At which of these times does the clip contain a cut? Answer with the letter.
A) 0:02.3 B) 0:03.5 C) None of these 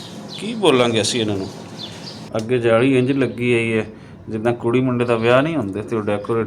A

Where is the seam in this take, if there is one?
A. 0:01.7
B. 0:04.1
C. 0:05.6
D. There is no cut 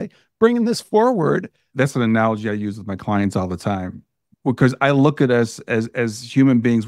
A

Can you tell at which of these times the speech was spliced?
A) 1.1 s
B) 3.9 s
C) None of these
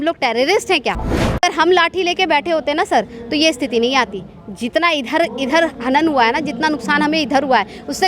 A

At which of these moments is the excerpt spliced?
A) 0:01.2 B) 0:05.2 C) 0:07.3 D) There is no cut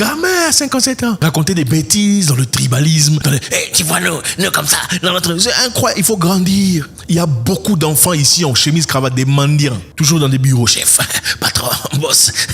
A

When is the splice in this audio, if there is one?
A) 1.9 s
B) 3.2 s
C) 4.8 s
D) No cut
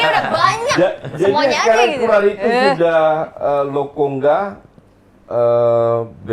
D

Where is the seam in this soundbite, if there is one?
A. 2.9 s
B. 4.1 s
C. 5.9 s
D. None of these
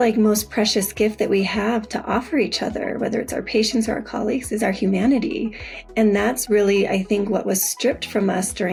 D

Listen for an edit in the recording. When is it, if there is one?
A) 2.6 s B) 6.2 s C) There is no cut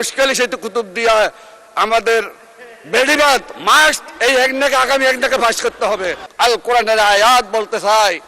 B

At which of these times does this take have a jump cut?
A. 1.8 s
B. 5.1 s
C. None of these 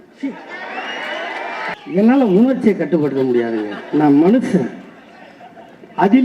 A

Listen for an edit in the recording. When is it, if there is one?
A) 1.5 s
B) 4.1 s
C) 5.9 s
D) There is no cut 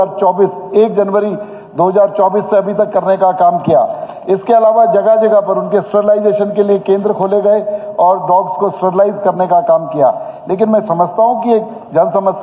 D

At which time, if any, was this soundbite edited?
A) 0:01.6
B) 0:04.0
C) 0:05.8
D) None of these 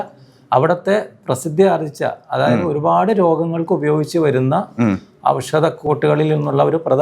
C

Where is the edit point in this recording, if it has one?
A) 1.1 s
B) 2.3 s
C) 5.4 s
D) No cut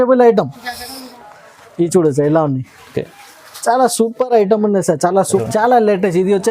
C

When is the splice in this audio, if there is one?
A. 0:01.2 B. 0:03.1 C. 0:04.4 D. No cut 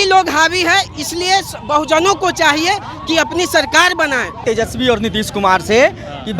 C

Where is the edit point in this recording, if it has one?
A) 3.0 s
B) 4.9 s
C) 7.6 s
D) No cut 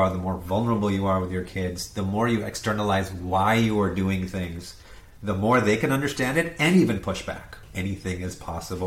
C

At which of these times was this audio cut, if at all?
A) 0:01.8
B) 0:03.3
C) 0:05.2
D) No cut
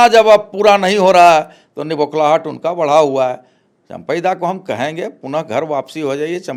D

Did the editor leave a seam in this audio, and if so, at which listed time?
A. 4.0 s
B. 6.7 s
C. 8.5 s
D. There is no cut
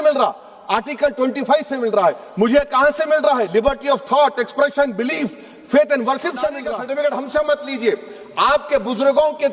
B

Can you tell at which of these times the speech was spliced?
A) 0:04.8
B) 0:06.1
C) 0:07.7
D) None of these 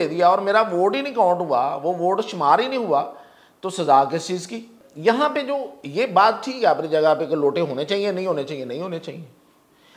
A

